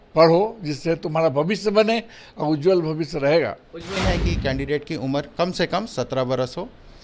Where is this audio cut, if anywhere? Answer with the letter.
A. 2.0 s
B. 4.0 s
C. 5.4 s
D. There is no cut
B